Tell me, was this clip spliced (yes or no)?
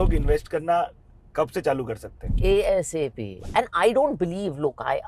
yes